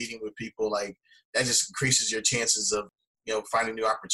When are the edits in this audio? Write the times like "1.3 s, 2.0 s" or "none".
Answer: 2.9 s